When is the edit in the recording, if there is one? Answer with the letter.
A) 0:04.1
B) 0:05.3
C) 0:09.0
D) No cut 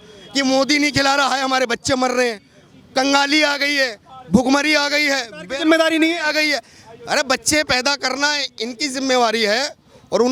D